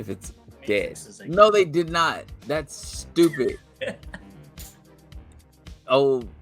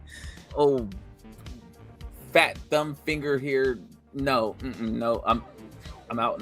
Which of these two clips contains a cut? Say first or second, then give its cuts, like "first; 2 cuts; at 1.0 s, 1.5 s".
first; 3 cuts; at 1.1 s, 4.2 s, 5.5 s